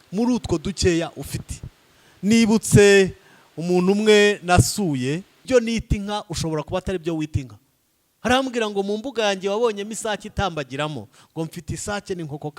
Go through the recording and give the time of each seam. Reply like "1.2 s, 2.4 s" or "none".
5.4 s